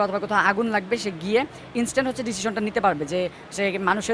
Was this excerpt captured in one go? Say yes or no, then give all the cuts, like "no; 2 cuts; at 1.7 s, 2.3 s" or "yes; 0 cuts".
yes; 0 cuts